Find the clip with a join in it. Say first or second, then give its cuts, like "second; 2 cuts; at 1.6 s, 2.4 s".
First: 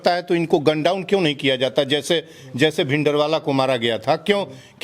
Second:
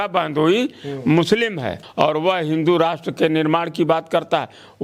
second; 1 cut; at 1.8 s